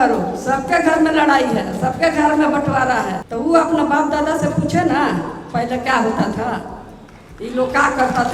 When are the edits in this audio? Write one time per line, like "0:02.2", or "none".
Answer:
0:03.2